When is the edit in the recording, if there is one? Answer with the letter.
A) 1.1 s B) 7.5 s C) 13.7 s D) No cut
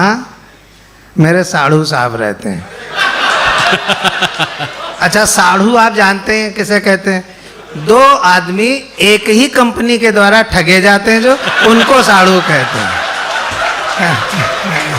D